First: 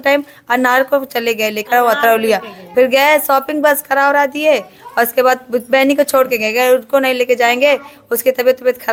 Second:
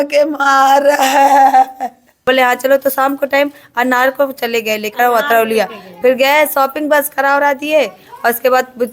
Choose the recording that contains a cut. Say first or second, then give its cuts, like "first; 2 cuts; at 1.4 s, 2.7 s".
second; 1 cut; at 2.1 s